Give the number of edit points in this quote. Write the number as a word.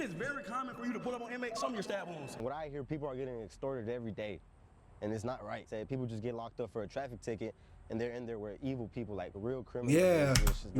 one